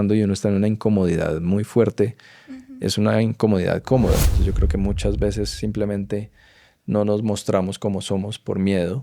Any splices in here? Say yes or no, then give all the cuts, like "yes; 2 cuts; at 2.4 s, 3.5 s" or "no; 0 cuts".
yes; 1 cut; at 4.3 s